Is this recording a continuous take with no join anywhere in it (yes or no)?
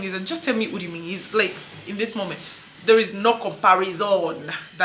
yes